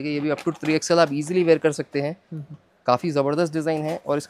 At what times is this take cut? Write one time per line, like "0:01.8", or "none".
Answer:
none